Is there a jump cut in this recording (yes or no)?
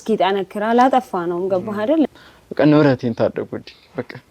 yes